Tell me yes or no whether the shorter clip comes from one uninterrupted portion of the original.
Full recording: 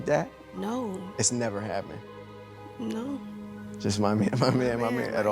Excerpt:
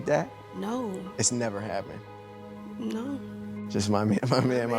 no